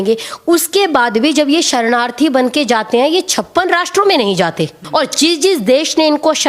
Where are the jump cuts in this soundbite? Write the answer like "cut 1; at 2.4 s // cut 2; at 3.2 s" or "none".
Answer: cut 1; at 4.8 s